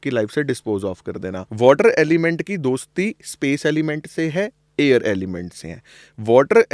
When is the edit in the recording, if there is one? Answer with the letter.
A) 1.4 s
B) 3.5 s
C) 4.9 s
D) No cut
A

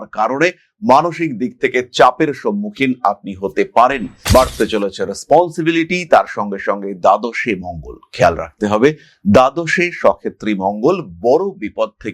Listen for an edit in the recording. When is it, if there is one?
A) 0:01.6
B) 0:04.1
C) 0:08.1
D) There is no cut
B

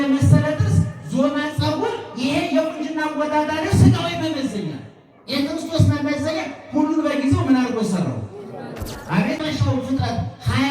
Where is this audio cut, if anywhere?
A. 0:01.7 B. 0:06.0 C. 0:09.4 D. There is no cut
C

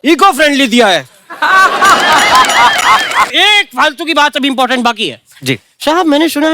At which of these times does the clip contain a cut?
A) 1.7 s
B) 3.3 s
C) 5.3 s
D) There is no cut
B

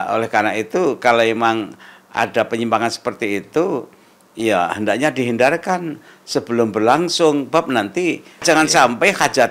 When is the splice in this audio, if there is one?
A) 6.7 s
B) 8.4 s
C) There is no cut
B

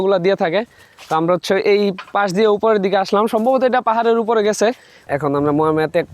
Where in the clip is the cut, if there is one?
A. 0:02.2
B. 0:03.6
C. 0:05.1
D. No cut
C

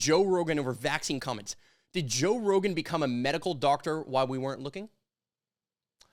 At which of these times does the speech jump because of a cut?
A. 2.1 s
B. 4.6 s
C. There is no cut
C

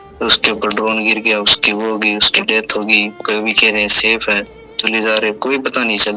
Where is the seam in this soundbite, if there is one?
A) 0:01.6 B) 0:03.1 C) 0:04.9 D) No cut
C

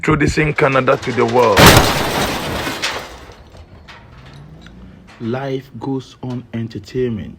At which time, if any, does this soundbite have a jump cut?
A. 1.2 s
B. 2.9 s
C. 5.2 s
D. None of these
D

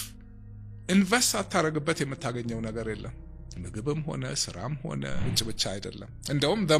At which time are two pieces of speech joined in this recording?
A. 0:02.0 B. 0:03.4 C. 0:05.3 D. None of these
C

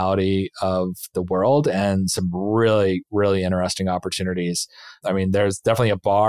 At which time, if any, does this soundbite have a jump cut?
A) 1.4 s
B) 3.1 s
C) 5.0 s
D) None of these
C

